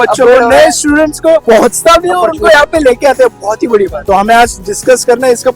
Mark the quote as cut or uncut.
cut